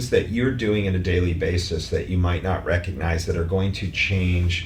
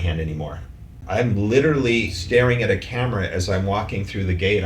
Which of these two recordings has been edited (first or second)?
second